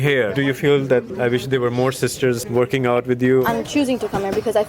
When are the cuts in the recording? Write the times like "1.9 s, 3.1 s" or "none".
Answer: 1.1 s, 2.4 s, 3.5 s